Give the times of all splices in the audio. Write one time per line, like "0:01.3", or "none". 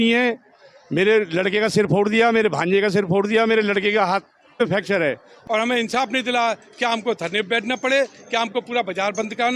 0:05.3